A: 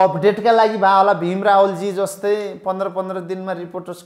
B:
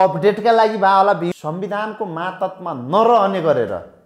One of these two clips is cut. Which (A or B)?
B